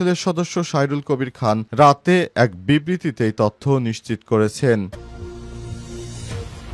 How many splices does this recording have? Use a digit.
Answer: 1